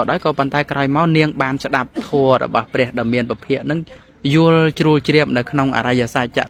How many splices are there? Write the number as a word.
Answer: zero